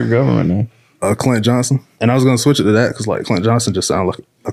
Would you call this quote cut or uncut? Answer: cut